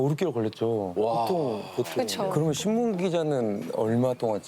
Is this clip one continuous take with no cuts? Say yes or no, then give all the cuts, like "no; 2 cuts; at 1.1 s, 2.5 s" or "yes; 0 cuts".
no; 1 cut; at 2.2 s